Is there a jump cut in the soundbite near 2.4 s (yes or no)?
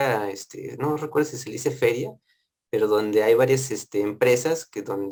no